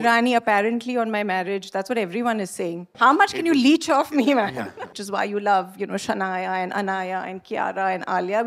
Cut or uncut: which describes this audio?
cut